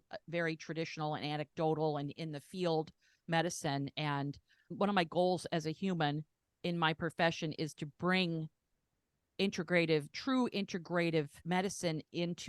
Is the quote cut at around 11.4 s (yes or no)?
yes